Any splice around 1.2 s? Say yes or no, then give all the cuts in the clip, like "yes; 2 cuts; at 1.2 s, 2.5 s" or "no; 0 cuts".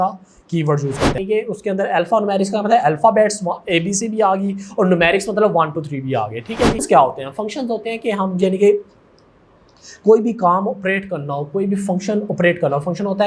yes; 2 cuts; at 1.2 s, 6.8 s